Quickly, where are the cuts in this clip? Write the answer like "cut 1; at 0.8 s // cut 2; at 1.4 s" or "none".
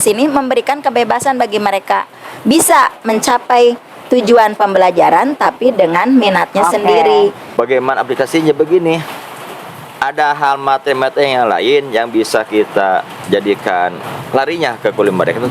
cut 1; at 7.4 s